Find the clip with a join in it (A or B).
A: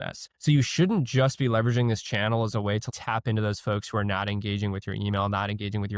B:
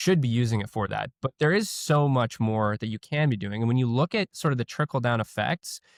A